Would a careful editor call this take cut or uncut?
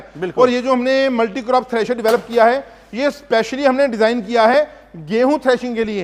uncut